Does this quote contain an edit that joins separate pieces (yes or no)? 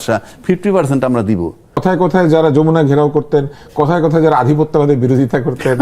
yes